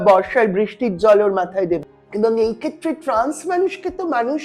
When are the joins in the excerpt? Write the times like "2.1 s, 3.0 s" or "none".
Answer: 1.8 s